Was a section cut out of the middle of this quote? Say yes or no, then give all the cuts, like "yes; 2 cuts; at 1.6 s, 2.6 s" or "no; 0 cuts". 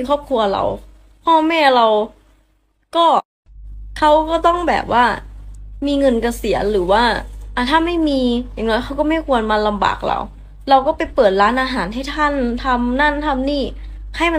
no; 0 cuts